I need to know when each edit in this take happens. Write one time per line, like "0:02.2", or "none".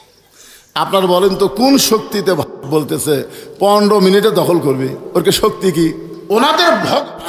0:06.1